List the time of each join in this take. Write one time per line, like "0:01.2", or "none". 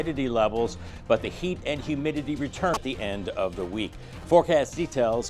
0:02.8